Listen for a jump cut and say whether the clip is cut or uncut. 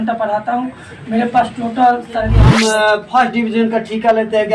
cut